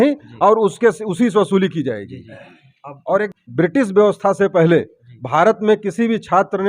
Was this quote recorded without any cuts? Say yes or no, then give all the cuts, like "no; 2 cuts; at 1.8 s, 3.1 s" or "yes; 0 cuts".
no; 1 cut; at 3.3 s